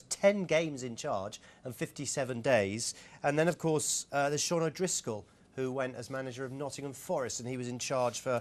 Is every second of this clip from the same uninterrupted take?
no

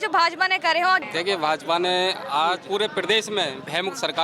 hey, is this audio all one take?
no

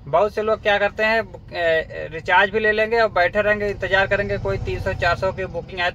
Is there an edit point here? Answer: no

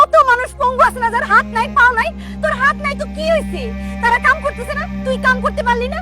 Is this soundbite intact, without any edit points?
yes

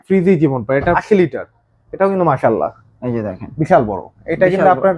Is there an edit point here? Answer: yes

